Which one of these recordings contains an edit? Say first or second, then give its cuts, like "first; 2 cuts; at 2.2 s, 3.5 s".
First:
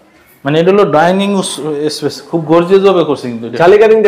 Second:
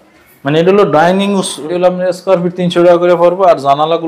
second; 1 cut; at 1.6 s